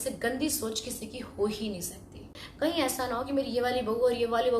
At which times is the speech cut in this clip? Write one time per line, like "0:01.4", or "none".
0:02.4